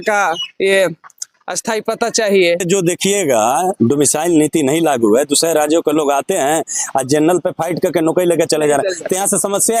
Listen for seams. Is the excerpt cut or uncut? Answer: uncut